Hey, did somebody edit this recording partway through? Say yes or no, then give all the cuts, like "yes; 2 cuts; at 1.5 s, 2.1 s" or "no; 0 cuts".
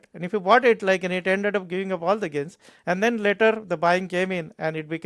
no; 0 cuts